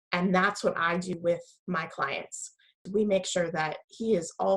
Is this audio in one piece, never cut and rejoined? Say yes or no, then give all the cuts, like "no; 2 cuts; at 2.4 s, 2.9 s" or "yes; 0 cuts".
no; 1 cut; at 2.8 s